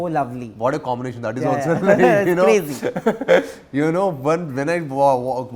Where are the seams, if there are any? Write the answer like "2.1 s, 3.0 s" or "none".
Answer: none